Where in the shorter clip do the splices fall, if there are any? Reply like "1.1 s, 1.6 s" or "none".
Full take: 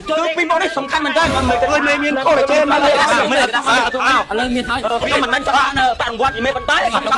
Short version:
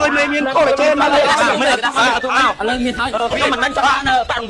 none